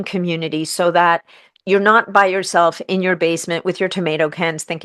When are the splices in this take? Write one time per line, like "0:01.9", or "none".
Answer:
none